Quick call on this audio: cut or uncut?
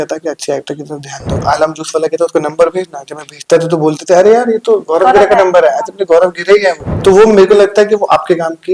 cut